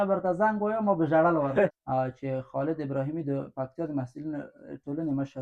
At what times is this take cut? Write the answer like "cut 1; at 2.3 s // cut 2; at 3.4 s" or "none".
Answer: cut 1; at 1.3 s